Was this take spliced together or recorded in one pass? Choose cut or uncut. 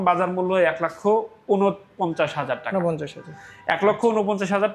uncut